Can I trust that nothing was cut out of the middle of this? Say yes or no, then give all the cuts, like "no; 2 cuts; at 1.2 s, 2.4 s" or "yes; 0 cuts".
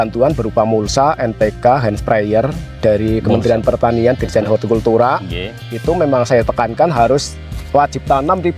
yes; 0 cuts